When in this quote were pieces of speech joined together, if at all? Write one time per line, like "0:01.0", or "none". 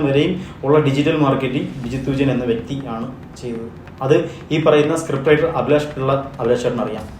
0:03.9